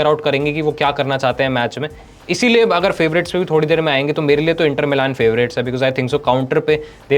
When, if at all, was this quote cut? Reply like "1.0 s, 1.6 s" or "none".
none